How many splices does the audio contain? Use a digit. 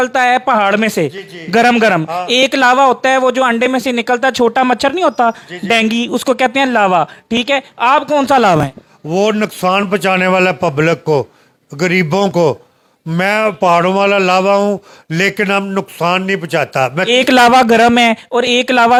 0